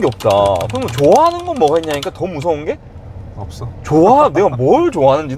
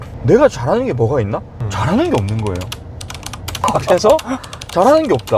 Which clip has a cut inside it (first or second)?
second